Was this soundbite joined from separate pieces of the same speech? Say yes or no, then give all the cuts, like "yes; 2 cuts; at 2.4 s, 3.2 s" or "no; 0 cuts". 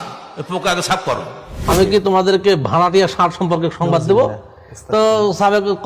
yes; 1 cut; at 1.6 s